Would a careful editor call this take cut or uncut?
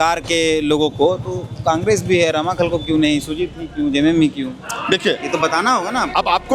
uncut